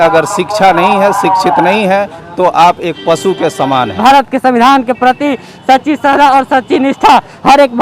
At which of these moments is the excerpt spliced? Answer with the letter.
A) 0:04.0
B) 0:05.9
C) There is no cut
A